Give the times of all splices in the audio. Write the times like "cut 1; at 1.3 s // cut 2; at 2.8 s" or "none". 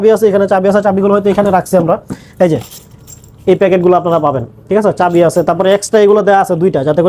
none